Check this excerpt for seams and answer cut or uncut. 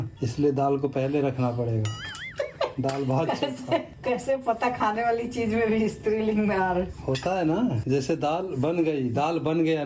uncut